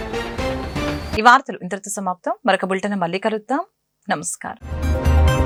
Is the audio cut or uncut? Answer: uncut